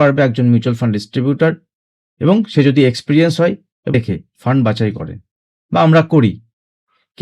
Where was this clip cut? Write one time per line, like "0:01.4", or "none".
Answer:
0:03.9